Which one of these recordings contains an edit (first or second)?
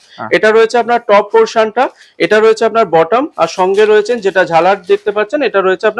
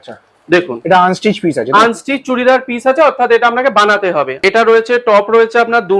second